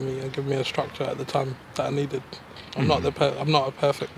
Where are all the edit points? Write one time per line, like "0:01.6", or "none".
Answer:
0:02.6

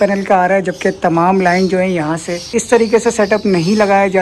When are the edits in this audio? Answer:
0:02.5

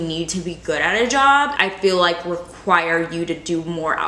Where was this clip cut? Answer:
none

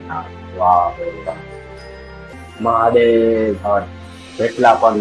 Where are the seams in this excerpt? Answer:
0:02.3

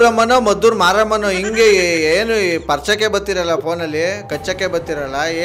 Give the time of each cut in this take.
none

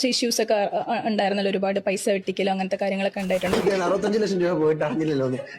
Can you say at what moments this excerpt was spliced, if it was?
0:03.6

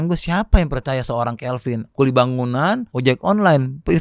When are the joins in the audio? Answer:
0:01.8
0:02.9

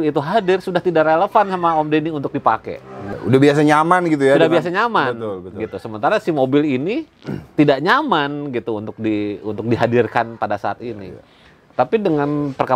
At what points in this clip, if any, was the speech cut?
0:03.2

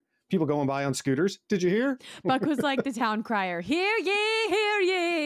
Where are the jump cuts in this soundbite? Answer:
0:02.3

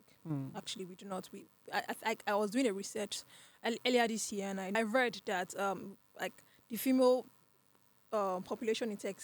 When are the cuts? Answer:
0:04.8

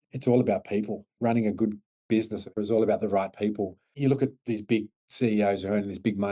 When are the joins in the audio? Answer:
0:01.1
0:02.5
0:03.8
0:05.0

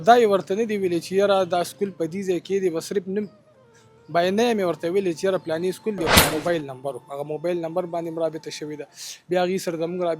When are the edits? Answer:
0:06.3

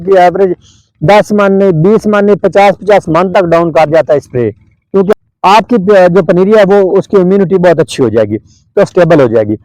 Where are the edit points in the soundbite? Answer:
0:05.1

